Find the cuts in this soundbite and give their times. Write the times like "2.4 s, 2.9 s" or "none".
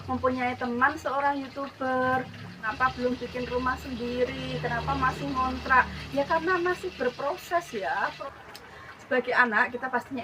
2.6 s, 8.2 s